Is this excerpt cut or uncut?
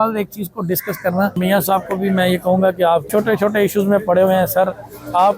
cut